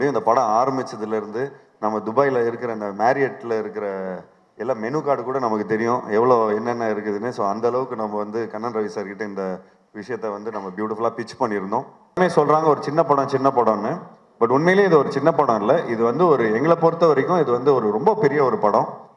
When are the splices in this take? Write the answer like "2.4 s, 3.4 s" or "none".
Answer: 12.2 s

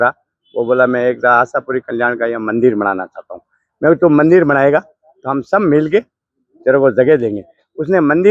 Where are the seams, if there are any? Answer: none

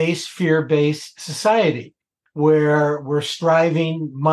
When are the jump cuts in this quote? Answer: none

